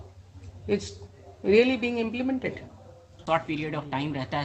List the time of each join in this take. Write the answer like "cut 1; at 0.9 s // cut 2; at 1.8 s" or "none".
cut 1; at 3.2 s